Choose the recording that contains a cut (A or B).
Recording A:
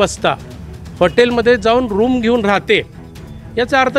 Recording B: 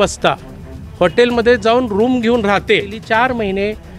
B